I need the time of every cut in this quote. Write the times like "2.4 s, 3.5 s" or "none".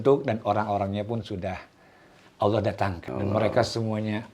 3.0 s